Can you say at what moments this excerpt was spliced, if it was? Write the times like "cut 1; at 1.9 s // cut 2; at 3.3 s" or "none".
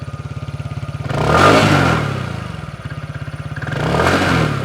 none